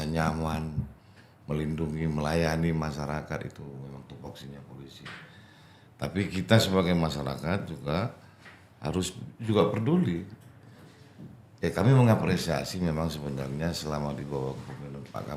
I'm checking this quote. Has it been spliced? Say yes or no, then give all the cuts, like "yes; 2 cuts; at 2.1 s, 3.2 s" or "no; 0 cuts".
no; 0 cuts